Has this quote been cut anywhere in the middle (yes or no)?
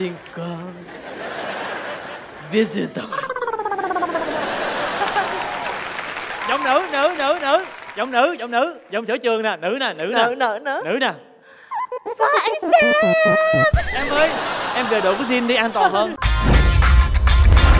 yes